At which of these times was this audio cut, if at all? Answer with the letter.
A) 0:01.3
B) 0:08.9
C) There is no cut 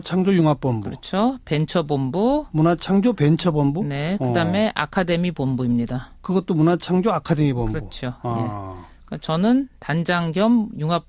C